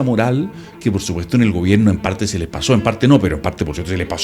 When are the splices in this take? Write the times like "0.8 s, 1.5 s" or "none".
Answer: none